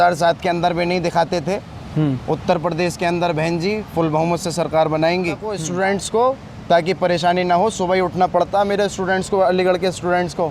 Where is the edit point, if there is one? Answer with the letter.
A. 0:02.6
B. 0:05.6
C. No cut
B